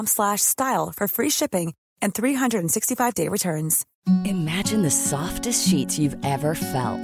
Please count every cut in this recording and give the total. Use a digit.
1